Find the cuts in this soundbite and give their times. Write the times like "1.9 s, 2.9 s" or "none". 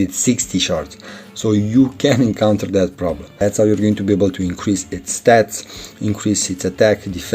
3.3 s